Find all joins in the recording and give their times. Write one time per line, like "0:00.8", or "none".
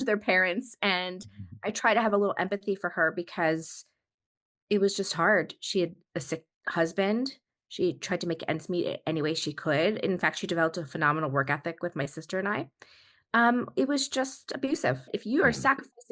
0:15.1